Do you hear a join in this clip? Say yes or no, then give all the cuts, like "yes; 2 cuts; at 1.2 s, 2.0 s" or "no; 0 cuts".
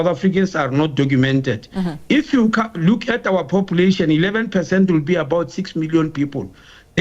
no; 0 cuts